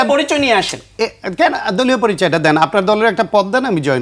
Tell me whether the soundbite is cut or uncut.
uncut